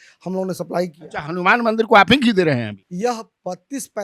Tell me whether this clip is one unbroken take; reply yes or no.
no